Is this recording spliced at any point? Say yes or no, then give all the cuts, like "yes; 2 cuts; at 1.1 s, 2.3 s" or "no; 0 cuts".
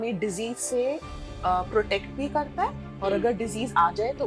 no; 0 cuts